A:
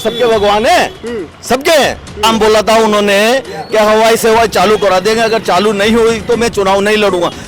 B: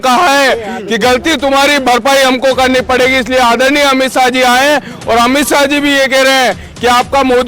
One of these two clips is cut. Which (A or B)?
A